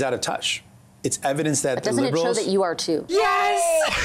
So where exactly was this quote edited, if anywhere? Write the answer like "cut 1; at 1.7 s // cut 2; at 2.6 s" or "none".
cut 1; at 3.1 s